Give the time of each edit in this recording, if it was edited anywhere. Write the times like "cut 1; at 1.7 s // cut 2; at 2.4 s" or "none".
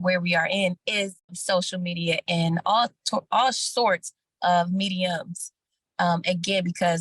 cut 1; at 1.4 s